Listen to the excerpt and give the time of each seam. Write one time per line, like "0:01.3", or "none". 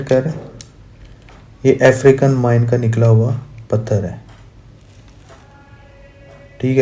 none